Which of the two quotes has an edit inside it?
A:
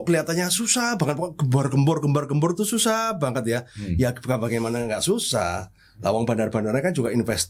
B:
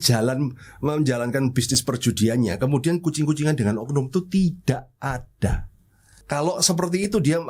B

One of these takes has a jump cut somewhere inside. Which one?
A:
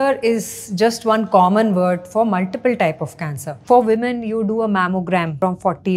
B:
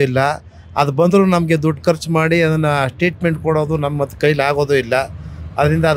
A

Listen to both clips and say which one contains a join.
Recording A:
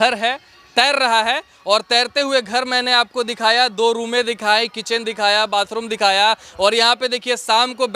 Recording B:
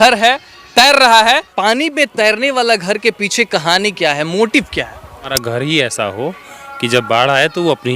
B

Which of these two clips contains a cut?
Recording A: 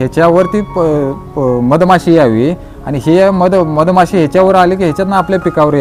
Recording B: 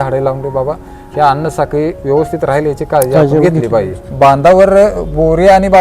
B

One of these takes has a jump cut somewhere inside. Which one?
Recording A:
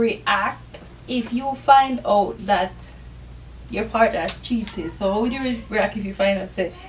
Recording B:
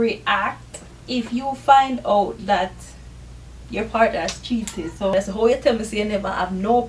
B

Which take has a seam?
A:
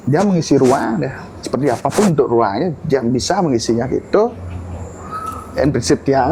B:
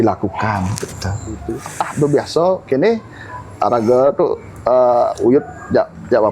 B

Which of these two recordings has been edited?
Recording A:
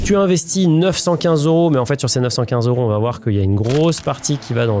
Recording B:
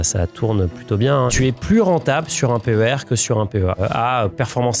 B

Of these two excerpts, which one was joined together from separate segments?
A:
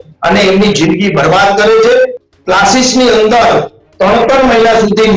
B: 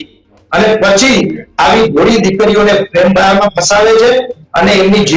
A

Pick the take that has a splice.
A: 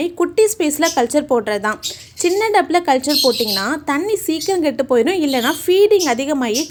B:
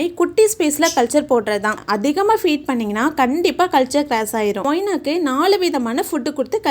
B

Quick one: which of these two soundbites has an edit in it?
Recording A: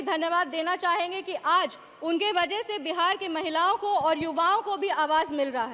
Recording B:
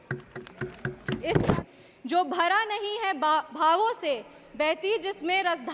B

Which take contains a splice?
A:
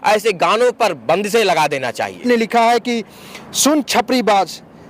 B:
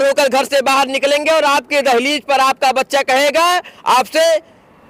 A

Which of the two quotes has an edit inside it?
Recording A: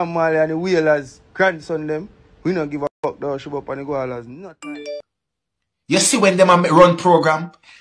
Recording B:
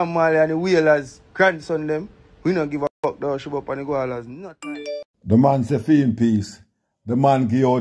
A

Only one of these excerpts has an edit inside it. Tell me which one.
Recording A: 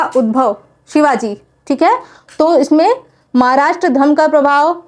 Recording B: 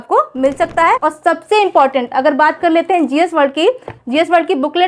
B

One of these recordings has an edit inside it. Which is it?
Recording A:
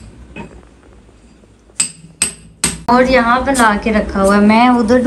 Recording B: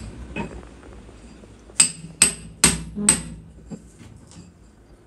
A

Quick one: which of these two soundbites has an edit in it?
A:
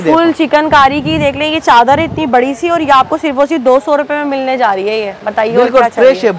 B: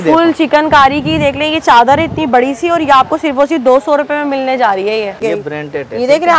B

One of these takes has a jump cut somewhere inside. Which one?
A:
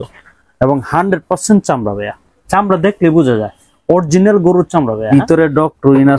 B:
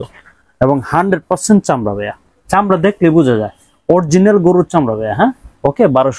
A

